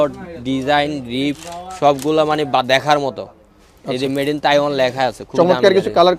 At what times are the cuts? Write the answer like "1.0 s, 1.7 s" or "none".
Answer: none